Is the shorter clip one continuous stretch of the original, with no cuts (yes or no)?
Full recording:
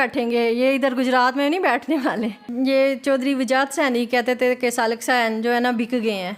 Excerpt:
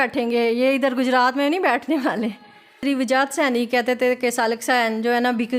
no